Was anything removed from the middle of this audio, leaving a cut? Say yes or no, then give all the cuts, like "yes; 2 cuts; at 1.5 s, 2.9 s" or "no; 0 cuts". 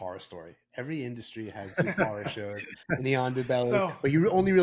no; 0 cuts